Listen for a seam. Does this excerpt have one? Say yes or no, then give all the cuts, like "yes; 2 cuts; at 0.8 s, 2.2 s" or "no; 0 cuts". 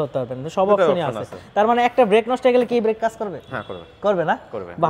no; 0 cuts